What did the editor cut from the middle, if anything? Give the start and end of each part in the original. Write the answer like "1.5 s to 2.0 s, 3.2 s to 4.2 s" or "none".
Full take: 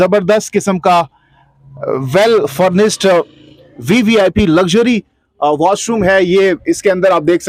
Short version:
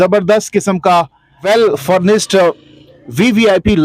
1.4 s to 2.1 s